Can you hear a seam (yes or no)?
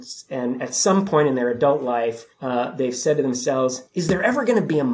yes